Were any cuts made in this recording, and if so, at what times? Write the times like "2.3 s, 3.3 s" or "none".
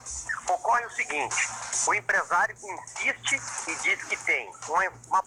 none